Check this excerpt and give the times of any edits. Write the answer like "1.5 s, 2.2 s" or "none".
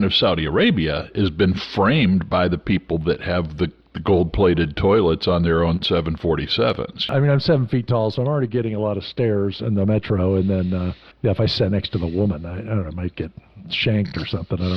7.1 s, 11.0 s